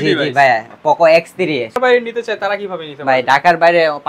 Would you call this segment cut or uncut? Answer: cut